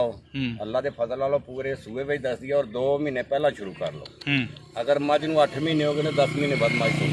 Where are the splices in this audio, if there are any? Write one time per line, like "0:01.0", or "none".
none